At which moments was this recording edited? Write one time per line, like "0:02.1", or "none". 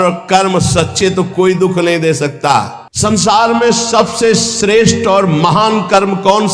0:02.8